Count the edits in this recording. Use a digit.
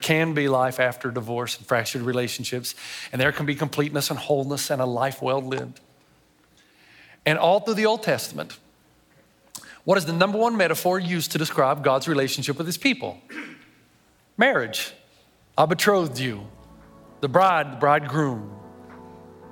0